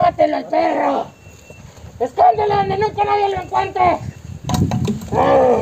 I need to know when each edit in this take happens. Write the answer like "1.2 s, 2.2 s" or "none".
4.4 s